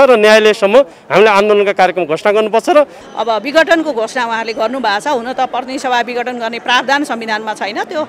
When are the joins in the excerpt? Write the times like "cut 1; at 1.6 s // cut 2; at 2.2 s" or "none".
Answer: cut 1; at 3.0 s